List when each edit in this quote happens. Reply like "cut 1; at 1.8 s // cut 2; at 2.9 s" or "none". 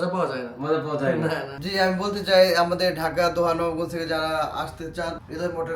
cut 1; at 1.5 s